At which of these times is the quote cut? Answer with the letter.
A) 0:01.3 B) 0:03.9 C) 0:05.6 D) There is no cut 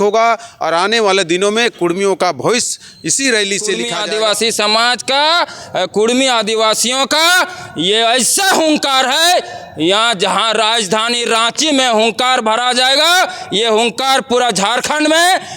B